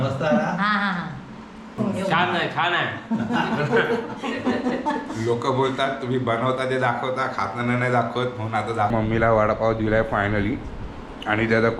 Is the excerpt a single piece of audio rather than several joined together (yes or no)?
no